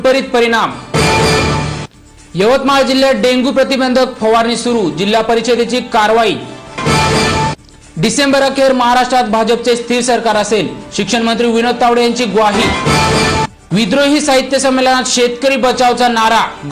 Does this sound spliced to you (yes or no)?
no